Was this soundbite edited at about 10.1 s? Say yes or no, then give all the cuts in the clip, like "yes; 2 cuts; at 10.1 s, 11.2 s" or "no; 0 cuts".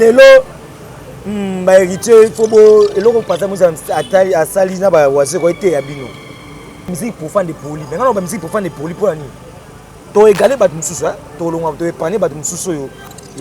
no; 1 cut; at 6.9 s